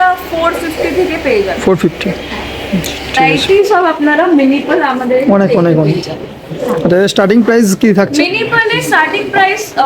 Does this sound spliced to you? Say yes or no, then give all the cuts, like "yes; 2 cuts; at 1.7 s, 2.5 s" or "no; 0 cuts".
yes; 1 cut; at 3.2 s